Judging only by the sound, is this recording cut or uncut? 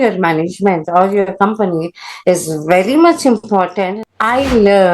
cut